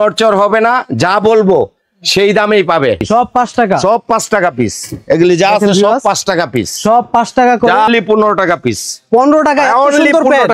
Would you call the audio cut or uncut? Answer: cut